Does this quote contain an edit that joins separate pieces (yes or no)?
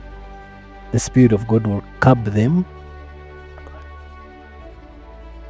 no